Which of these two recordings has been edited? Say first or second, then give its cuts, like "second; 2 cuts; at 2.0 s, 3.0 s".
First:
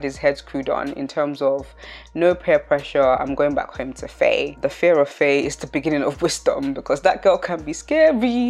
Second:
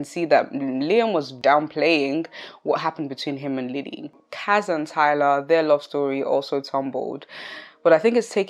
second; 2 cuts; at 1.4 s, 4.1 s